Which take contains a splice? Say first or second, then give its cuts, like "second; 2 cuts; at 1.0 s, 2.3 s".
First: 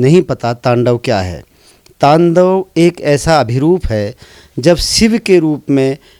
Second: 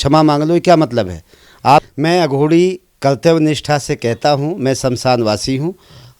second; 1 cut; at 1.9 s